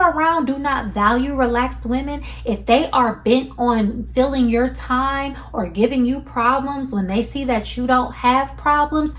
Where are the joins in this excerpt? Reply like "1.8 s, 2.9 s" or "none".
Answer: none